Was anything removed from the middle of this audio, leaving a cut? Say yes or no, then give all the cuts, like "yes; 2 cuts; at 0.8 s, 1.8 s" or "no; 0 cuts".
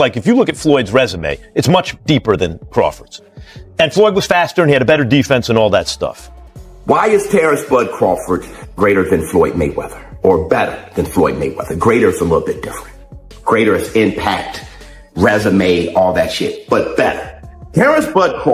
yes; 1 cut; at 6.8 s